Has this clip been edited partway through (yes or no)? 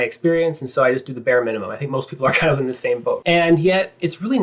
yes